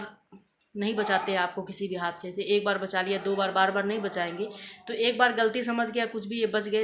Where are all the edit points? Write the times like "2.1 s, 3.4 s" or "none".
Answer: none